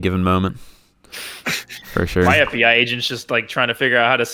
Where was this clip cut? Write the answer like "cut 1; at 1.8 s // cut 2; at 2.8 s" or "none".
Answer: none